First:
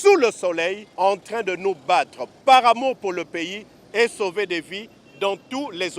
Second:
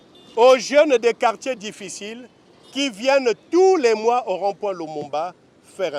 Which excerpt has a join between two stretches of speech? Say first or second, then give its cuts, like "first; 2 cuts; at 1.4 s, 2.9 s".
first; 2 cuts; at 0.8 s, 2.2 s